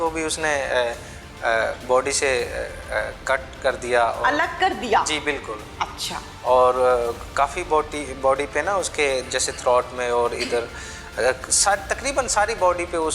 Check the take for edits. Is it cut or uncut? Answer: uncut